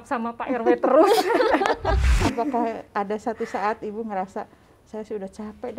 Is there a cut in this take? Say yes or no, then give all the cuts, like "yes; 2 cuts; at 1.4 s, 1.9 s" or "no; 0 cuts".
yes; 1 cut; at 2.1 s